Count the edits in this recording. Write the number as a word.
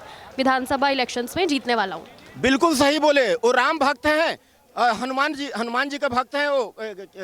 zero